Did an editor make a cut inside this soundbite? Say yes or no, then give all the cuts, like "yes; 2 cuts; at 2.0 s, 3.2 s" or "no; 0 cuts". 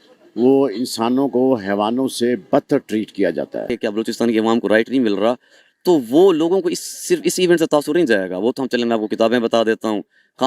yes; 1 cut; at 3.7 s